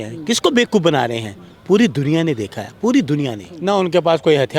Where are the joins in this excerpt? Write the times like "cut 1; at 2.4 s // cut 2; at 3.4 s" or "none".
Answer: cut 1; at 3.4 s